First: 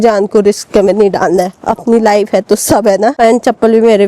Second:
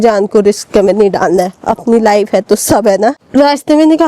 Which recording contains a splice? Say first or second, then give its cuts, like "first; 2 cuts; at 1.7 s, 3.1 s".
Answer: second; 1 cut; at 3.1 s